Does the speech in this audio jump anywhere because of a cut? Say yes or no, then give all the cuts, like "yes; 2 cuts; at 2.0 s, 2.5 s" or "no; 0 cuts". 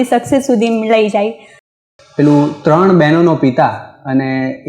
yes; 1 cut; at 1.7 s